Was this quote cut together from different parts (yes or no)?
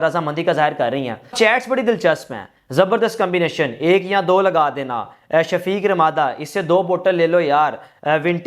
yes